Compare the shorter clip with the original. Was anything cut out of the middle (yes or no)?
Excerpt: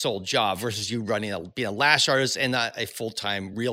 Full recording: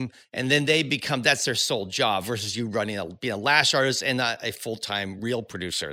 no